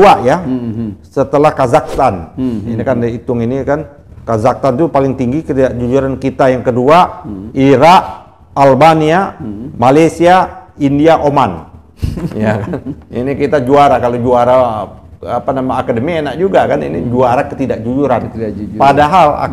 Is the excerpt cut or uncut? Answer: uncut